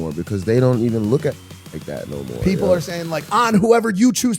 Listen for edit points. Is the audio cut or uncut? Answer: uncut